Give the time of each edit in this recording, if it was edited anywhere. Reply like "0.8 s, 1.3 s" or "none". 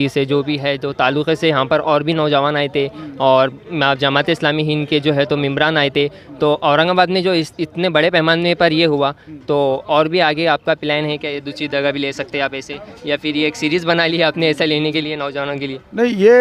none